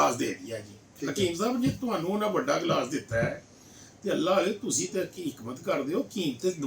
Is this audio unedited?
yes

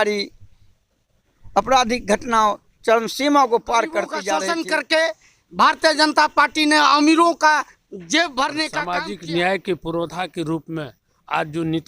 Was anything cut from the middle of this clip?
yes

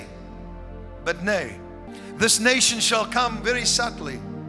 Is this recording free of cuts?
no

